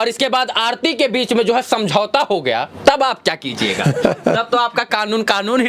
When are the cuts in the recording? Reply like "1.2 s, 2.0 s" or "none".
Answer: none

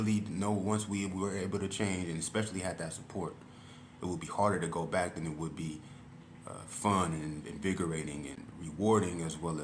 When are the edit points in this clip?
8.4 s

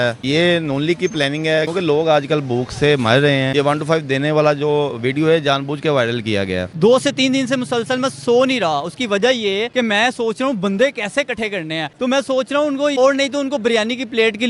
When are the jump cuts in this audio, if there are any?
1.7 s, 3.5 s, 6.7 s, 9.7 s, 11.9 s, 12.9 s

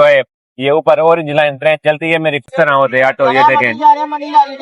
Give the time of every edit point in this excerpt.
2.5 s

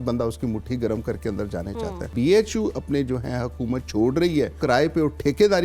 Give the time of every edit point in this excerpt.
2.1 s, 4.6 s

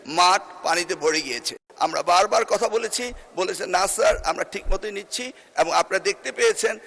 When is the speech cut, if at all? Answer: 1.6 s

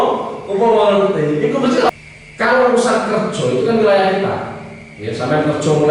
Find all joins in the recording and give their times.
1.9 s

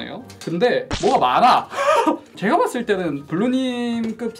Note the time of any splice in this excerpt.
0.9 s, 2.3 s

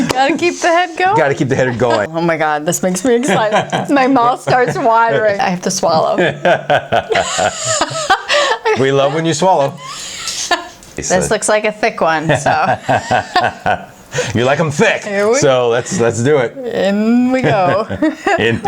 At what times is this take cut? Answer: 2.1 s, 5.4 s, 11.0 s

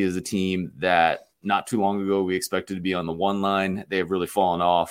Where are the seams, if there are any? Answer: none

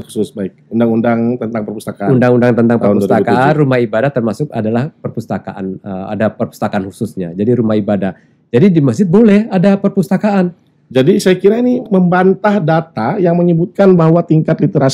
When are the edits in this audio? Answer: none

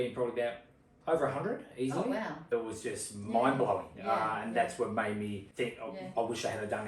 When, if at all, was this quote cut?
2.5 s, 5.4 s

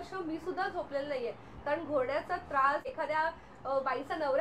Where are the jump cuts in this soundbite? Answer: 2.9 s

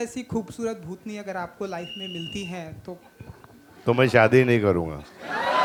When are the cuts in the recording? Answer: none

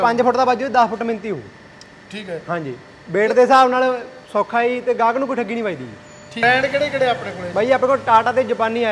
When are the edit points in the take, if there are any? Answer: 6.4 s

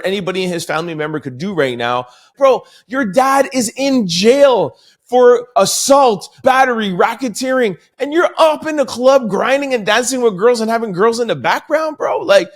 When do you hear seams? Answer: 2.3 s, 5.5 s, 6.4 s

